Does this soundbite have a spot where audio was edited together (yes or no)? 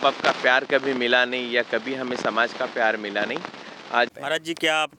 yes